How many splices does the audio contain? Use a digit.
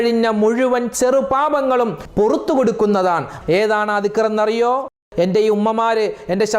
2